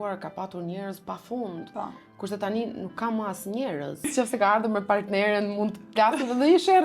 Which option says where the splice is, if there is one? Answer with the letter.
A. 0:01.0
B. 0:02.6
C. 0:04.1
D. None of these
C